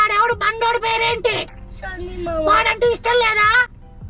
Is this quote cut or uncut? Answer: uncut